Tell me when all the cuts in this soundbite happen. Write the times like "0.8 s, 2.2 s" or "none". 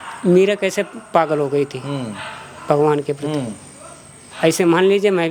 none